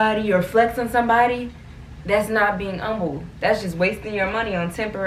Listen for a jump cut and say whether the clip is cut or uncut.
uncut